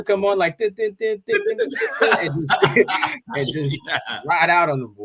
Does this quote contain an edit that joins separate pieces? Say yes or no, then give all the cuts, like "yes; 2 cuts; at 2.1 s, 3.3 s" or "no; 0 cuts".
yes; 1 cut; at 3.2 s